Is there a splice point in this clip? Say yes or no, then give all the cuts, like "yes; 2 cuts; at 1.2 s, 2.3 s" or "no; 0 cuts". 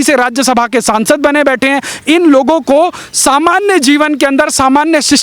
no; 0 cuts